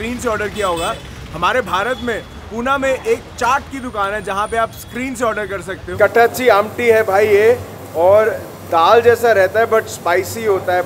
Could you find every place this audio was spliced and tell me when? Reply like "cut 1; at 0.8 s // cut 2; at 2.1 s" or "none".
cut 1; at 5.9 s